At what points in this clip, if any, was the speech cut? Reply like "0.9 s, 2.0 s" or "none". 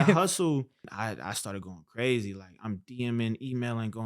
0.9 s